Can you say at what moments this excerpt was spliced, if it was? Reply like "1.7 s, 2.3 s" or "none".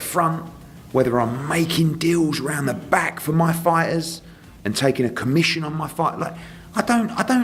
none